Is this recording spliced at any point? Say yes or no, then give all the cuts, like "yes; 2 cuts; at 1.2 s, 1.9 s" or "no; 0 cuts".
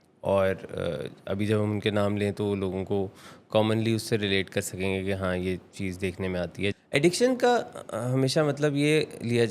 yes; 1 cut; at 6.7 s